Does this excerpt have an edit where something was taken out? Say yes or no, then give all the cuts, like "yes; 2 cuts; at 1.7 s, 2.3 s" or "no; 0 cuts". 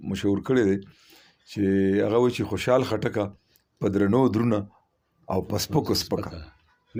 no; 0 cuts